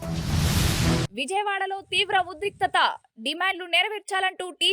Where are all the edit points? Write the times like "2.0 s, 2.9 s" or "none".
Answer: 1.1 s